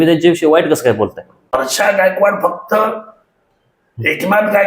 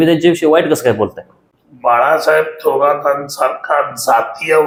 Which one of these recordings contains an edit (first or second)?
first